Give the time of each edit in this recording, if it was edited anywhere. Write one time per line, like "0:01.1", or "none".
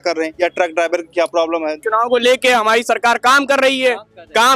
0:01.8

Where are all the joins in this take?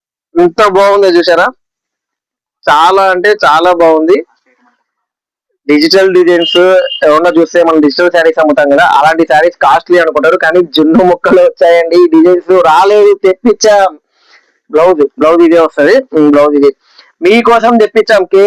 none

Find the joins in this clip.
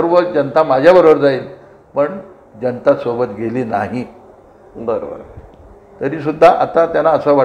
none

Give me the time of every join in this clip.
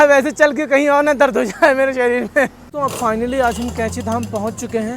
0:02.6

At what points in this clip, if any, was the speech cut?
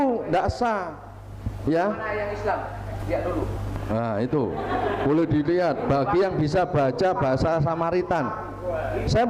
none

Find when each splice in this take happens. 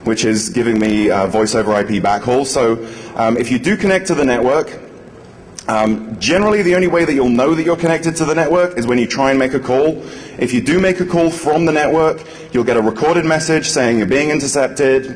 0:07.6

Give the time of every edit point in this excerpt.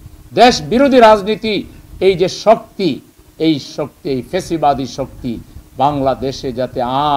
none

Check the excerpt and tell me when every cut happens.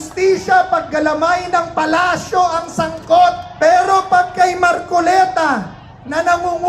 0:03.5

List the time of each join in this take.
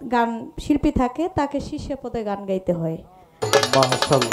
0:03.3

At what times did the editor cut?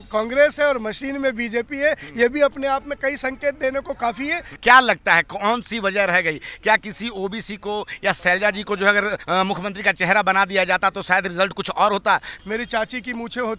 0:04.6
0:08.2
0:09.2
0:12.3

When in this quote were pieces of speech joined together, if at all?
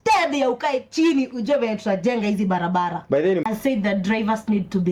0:03.5

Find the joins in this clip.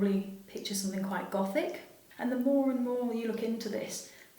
0:02.0

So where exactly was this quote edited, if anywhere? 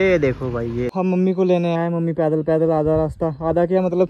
0:00.9

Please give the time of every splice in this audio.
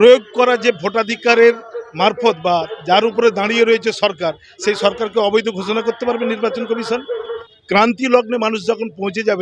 0:07.4

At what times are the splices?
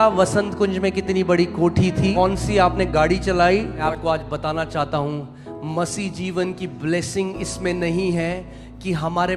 0:02.1
0:03.8

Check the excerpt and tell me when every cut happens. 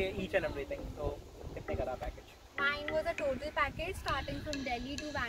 none

